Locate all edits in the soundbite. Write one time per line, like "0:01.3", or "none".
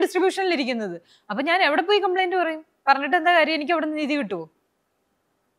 none